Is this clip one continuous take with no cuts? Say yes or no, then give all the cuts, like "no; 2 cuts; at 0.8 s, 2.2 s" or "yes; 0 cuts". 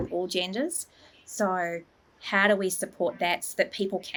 yes; 0 cuts